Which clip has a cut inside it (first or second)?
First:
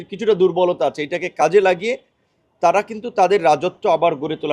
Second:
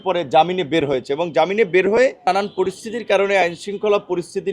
second